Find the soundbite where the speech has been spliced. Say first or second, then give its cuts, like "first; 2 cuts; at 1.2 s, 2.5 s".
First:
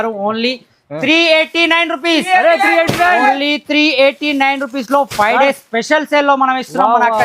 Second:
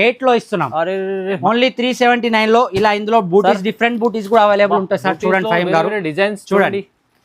second; 1 cut; at 1.4 s